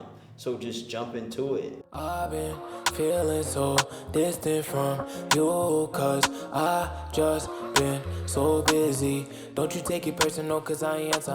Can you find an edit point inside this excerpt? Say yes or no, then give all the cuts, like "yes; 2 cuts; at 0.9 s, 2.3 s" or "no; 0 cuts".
yes; 1 cut; at 1.8 s